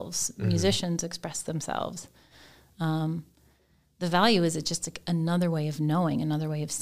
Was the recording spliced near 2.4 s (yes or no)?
no